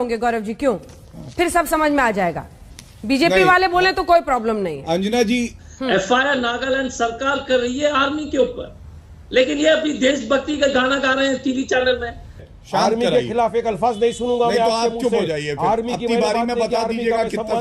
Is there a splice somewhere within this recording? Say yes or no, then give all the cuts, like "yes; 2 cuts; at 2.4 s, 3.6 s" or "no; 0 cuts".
yes; 2 cuts; at 5.6 s, 12.5 s